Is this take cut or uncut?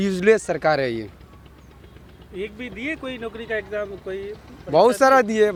uncut